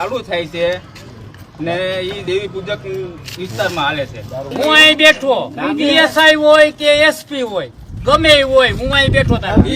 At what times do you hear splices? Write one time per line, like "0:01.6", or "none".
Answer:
0:04.5